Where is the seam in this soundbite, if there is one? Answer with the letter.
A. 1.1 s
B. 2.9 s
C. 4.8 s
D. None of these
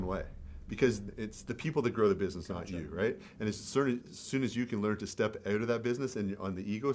A